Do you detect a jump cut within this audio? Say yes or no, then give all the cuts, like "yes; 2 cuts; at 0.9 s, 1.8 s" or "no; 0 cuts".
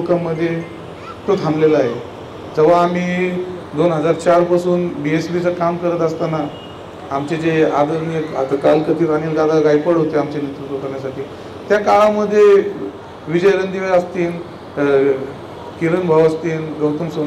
no; 0 cuts